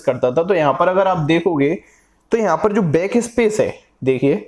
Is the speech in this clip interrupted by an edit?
no; 0 cuts

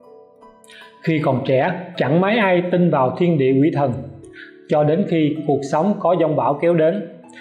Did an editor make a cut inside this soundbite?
yes; 1 cut; at 1.0 s

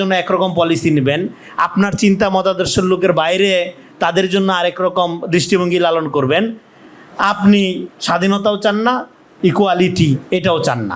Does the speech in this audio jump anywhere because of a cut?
yes; 2 cuts; at 7.9 s, 9.3 s

